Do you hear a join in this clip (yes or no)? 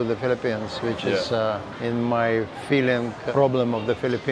yes